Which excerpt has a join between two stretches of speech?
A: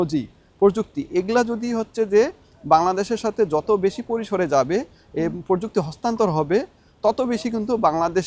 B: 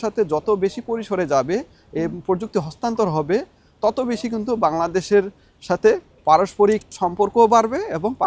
B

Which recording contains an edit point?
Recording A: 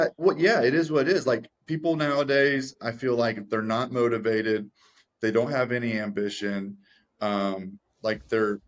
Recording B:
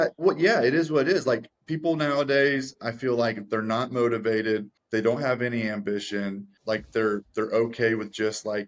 B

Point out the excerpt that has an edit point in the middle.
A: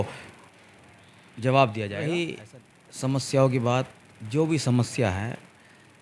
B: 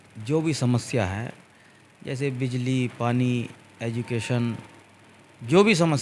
A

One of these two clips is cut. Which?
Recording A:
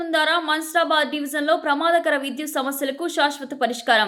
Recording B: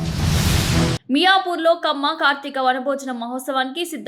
B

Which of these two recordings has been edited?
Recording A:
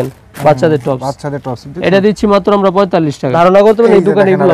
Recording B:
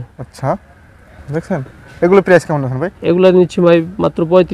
A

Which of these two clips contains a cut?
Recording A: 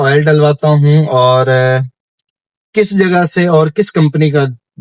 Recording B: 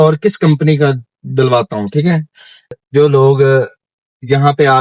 B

